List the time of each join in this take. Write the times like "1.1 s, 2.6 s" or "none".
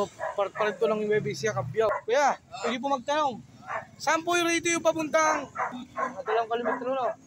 1.9 s, 5.8 s

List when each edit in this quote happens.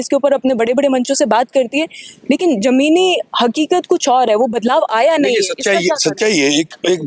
none

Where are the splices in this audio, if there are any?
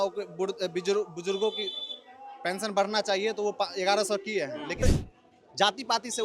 4.8 s

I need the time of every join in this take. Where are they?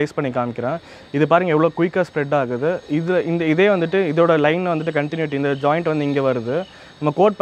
none

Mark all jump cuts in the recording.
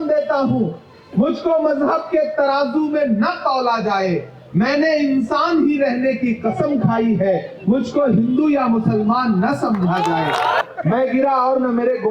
10.6 s

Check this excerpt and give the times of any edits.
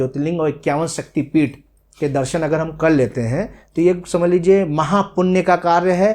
none

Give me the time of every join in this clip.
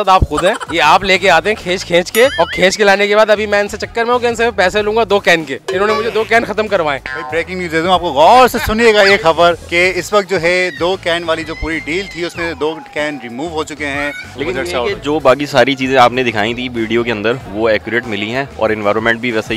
14.3 s

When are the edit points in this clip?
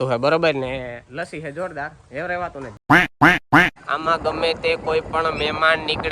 2.7 s, 3.8 s

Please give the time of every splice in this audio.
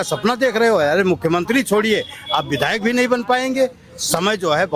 none

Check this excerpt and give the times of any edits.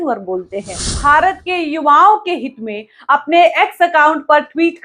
0.9 s

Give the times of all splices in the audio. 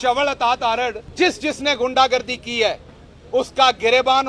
1.0 s

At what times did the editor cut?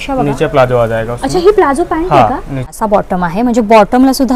2.7 s

